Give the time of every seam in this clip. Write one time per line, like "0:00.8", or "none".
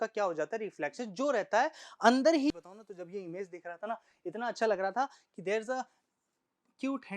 0:02.5